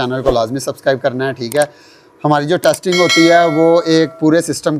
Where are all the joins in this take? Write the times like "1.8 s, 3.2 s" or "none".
none